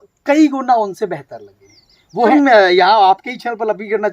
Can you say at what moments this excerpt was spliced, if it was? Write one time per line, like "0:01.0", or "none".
0:02.3